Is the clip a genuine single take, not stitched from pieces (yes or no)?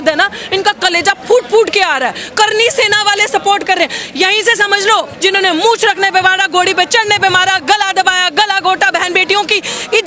no